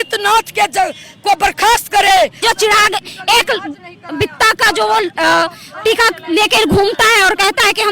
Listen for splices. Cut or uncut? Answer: cut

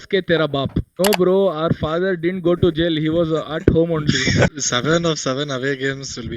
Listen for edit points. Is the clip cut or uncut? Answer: cut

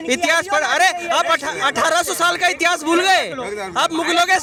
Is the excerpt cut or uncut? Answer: uncut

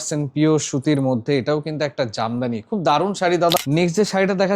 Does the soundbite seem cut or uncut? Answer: cut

